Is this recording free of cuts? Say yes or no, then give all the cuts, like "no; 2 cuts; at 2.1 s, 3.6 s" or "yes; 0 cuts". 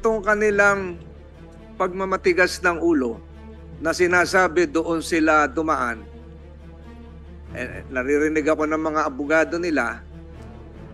no; 1 cut; at 10.0 s